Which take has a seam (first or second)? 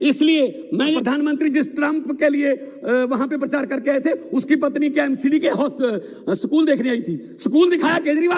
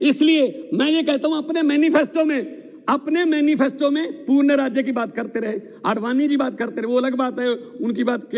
first